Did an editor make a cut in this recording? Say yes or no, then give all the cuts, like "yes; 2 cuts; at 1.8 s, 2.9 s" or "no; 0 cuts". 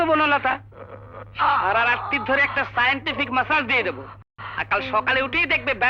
no; 0 cuts